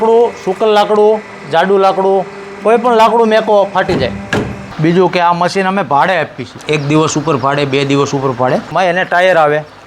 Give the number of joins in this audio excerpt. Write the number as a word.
three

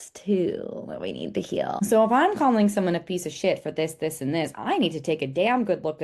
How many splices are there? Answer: one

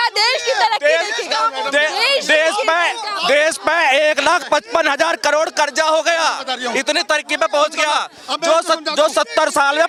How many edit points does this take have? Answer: zero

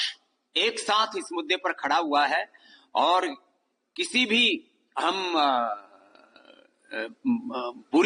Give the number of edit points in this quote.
zero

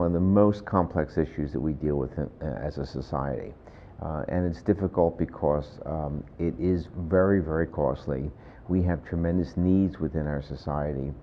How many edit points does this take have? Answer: one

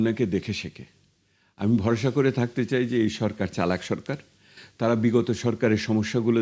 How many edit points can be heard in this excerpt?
zero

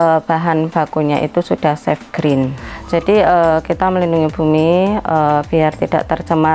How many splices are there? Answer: one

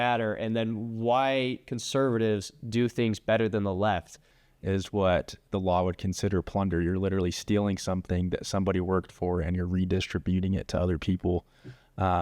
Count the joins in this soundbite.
one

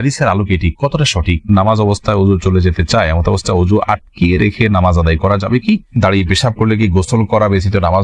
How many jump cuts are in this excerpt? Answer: two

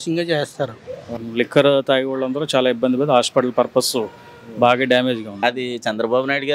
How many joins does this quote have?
two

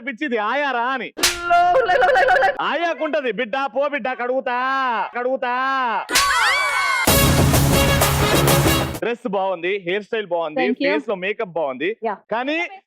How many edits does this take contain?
two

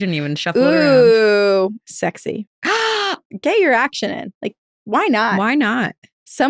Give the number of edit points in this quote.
one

